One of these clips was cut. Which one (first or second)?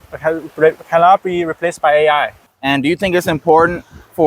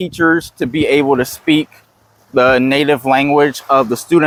first